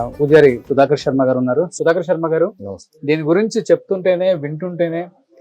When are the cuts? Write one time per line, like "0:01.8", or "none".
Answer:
none